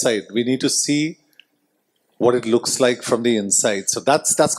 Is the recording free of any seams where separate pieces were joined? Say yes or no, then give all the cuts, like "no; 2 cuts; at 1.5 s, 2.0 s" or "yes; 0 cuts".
yes; 0 cuts